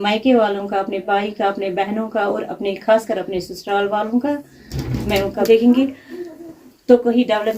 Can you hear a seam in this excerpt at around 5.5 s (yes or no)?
yes